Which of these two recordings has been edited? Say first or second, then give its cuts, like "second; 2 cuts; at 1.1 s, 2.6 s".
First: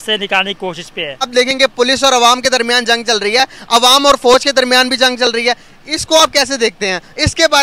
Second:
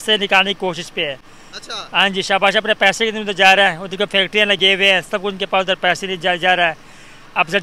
first; 1 cut; at 1.3 s